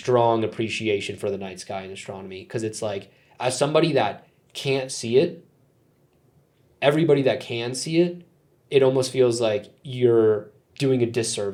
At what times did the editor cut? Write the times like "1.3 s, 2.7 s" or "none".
none